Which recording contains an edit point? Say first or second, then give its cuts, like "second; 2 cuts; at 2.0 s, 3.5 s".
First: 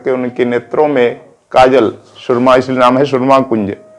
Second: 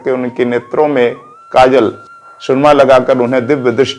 second; 1 cut; at 2.1 s